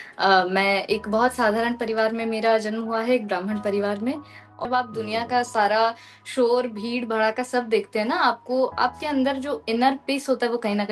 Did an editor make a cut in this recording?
yes; 1 cut; at 4.7 s

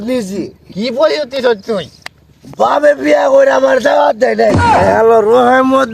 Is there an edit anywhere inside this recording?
yes; 1 cut; at 4.5 s

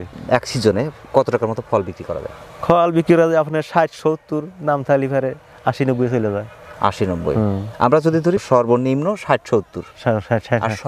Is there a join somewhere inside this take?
no; 0 cuts

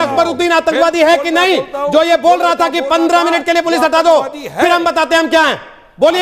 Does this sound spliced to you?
no; 0 cuts

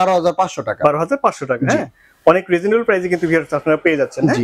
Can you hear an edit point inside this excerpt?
no; 0 cuts

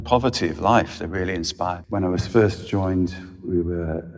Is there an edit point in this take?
yes; 1 cut; at 1.8 s

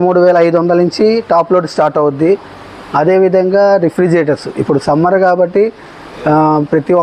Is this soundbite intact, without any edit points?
yes; 0 cuts

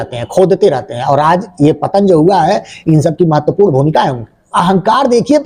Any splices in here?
yes; 1 cut; at 4.5 s

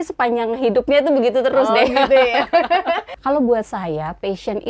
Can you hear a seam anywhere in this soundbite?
yes; 1 cut; at 3.1 s

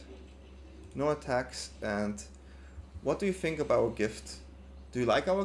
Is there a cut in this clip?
no; 0 cuts

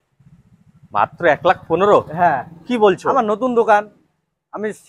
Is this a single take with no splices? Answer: yes; 0 cuts

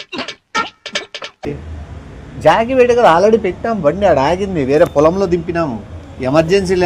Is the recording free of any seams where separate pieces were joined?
yes; 0 cuts

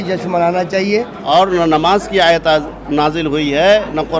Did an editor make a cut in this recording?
yes; 1 cut; at 1.2 s

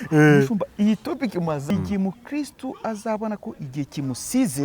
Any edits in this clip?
yes; 1 cut; at 1.7 s

